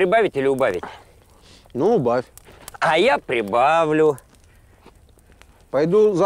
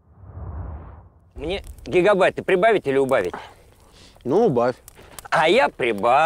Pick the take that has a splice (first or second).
second